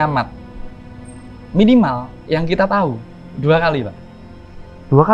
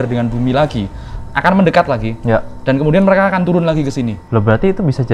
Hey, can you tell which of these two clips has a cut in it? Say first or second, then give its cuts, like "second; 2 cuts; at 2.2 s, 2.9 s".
second; 1 cut; at 4.2 s